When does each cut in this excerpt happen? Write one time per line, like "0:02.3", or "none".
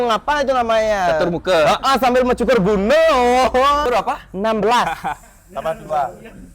0:03.8